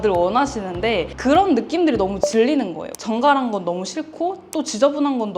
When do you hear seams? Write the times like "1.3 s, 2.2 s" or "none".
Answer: 2.9 s

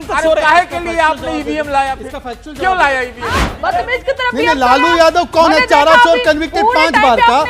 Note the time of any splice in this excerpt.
3.5 s

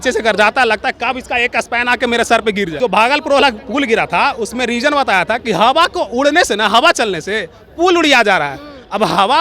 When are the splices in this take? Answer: 2.7 s

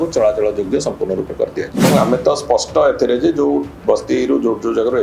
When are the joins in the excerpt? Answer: 1.9 s

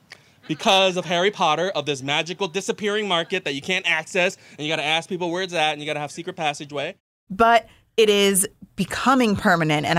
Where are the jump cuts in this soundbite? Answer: none

